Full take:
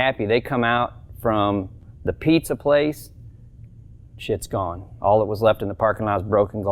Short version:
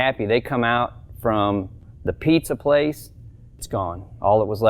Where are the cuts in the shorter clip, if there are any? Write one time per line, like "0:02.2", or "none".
0:03.6